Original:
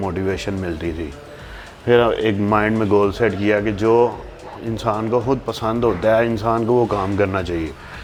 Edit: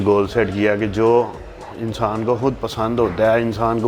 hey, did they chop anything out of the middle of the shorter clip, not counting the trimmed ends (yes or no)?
no